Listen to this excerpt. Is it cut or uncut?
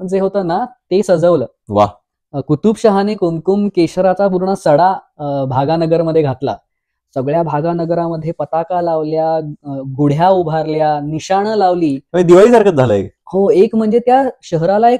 uncut